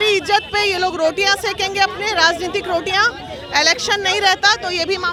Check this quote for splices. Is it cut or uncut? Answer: uncut